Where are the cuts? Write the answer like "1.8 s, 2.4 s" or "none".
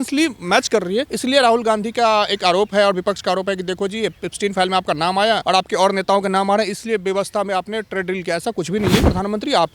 1.1 s, 5.4 s, 9.0 s